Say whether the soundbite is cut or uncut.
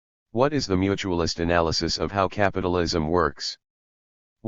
uncut